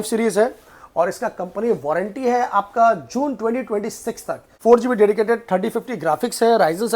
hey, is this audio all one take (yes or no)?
no